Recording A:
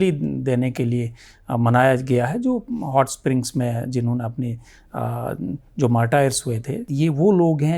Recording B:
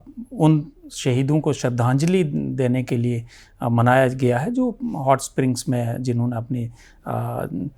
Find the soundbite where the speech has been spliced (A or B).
A